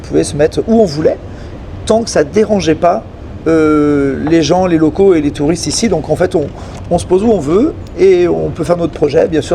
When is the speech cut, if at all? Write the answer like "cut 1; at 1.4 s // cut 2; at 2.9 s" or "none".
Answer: none